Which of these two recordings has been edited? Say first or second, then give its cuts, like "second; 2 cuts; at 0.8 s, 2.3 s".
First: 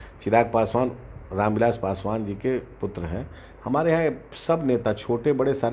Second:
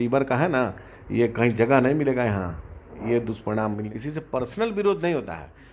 second; 1 cut; at 3.9 s